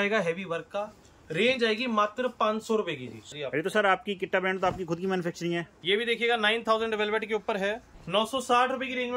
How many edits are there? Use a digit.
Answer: 3